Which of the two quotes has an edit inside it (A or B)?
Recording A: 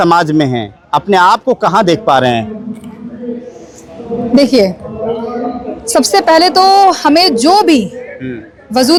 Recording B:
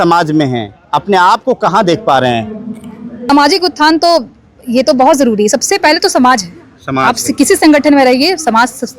B